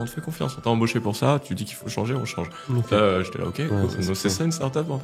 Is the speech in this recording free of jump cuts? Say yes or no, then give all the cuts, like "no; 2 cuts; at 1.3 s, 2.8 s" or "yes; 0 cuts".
yes; 0 cuts